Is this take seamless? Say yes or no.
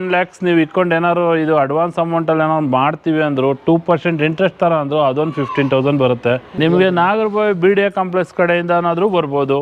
no